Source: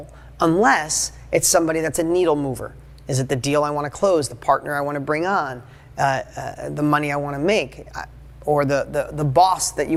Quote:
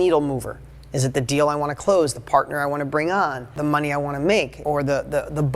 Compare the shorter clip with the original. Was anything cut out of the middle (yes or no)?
yes